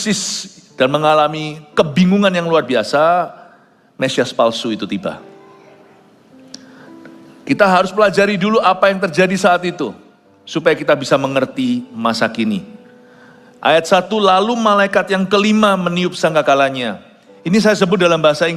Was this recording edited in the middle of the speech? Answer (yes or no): no